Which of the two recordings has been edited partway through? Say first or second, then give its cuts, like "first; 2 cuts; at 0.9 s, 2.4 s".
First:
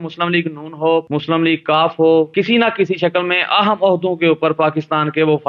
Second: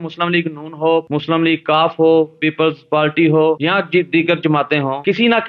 first; 1 cut; at 2.3 s